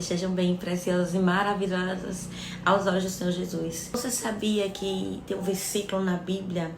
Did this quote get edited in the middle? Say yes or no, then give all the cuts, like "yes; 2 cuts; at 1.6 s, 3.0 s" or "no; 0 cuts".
yes; 1 cut; at 4.0 s